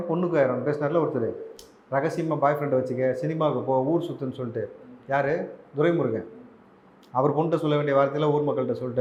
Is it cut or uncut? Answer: uncut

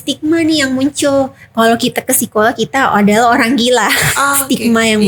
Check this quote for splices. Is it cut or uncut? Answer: uncut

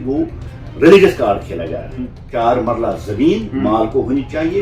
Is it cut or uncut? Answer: cut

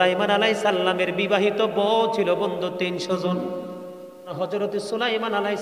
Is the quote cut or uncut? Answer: cut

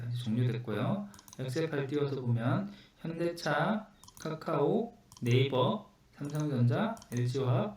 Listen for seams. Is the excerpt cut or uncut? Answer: uncut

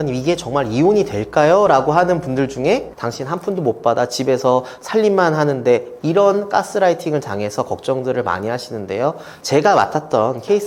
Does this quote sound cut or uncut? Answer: cut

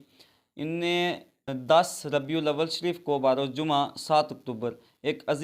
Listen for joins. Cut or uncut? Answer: cut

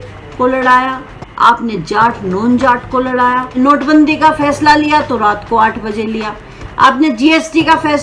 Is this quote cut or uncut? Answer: cut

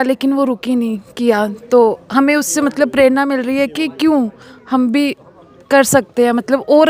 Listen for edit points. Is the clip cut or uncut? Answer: uncut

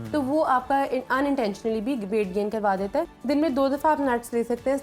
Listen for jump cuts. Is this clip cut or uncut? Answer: cut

